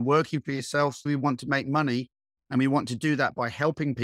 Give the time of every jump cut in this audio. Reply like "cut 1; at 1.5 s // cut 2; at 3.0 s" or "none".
cut 1; at 1.1 s